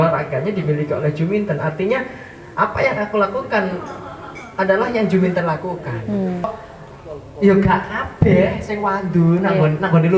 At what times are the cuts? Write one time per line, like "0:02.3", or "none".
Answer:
0:06.4